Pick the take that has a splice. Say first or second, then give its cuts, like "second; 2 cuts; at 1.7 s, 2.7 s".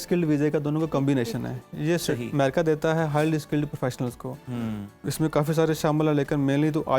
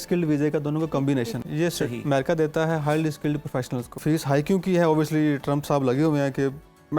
second; 2 cuts; at 1.4 s, 3.9 s